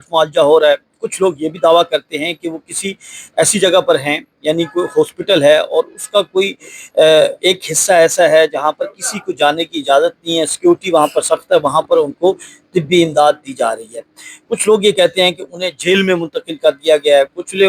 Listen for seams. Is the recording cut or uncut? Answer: uncut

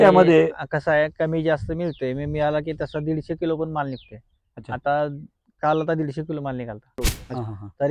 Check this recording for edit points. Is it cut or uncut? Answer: cut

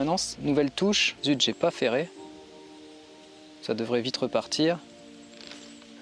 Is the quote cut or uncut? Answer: cut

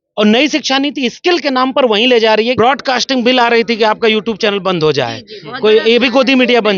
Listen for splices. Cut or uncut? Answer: cut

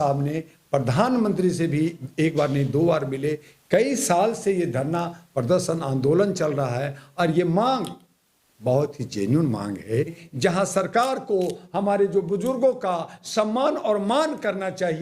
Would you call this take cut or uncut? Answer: cut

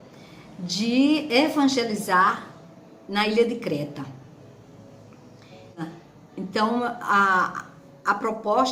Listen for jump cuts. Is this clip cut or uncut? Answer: cut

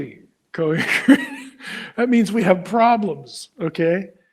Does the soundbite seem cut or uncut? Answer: uncut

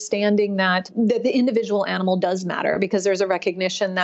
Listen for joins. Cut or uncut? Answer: cut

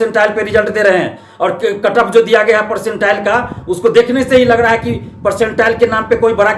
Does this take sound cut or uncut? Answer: uncut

